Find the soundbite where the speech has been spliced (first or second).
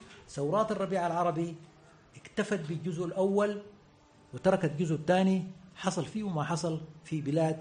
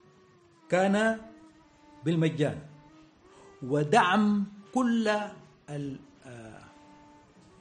second